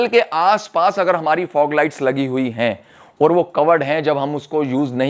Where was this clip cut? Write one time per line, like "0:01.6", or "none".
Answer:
none